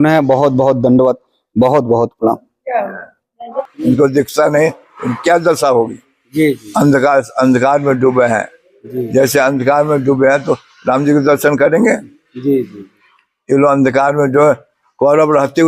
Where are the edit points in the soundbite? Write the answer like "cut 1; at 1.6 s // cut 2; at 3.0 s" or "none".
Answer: cut 1; at 3.5 s